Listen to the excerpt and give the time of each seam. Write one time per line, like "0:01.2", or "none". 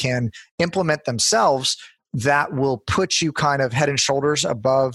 none